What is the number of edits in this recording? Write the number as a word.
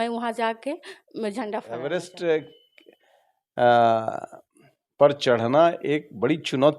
one